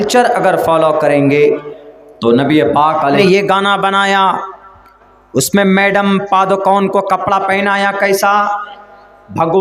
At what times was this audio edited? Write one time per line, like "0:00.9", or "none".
0:03.2